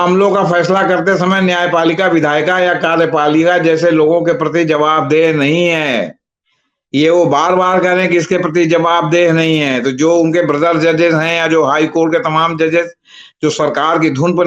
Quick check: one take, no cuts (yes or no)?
yes